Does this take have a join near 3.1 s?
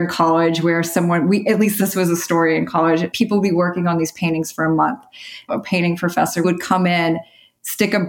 yes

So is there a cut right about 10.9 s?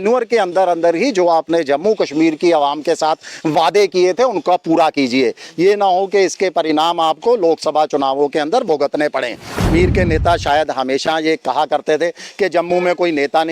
no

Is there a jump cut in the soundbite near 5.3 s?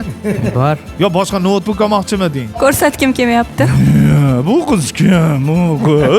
no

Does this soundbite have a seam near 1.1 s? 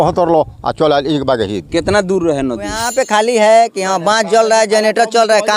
no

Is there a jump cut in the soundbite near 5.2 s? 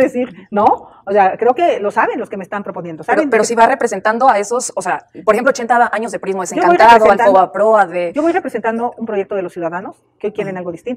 no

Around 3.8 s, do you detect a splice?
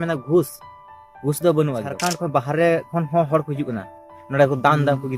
no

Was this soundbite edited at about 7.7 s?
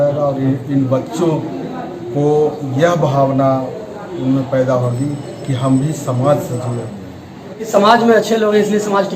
yes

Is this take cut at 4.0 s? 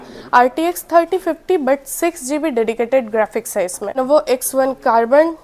yes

